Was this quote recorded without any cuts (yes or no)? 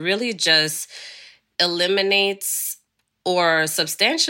no